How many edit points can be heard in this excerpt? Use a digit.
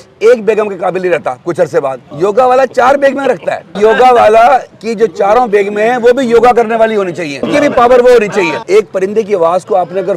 5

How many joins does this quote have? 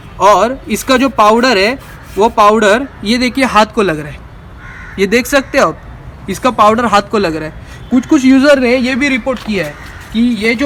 0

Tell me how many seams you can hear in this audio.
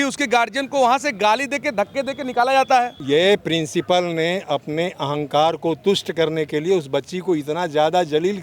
1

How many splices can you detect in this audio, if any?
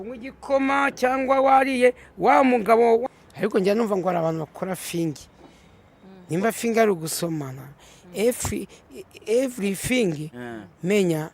1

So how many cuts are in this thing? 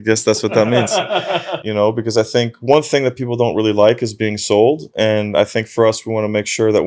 1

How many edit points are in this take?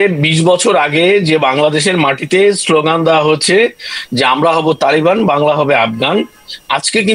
0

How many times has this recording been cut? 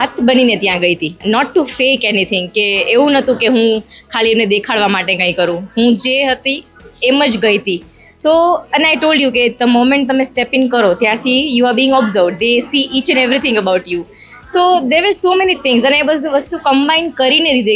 1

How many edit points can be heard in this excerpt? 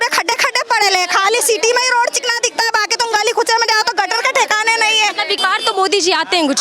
1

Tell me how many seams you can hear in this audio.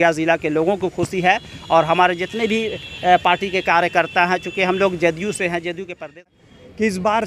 1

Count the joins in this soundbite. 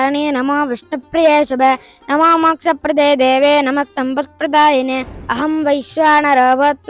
1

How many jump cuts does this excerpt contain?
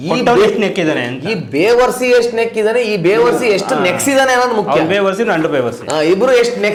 0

